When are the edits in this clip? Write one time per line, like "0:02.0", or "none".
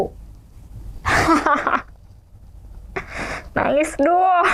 none